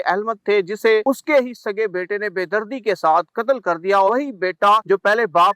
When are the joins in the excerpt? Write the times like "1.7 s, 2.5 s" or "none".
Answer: 1.0 s, 4.7 s